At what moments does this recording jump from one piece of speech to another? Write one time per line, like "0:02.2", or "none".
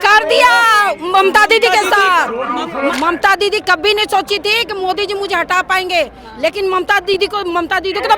0:02.9